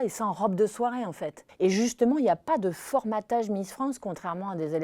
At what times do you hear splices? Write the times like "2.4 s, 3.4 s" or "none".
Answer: 1.5 s